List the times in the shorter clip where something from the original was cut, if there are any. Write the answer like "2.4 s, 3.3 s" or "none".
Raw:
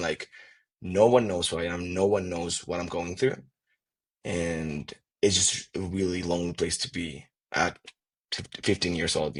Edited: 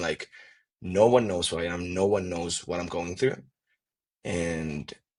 none